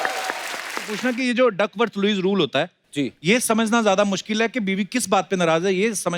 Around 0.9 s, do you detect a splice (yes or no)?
yes